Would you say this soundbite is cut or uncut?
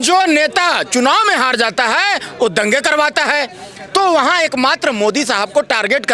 uncut